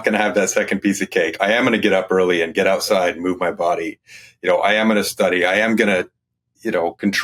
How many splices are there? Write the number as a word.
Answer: zero